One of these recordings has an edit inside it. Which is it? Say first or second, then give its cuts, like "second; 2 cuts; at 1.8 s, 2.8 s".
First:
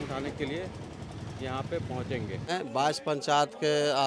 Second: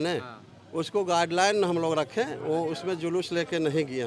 first; 1 cut; at 2.5 s